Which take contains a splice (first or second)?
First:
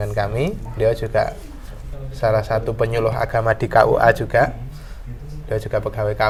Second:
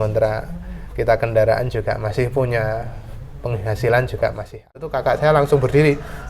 second